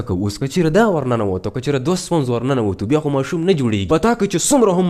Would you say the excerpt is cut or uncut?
cut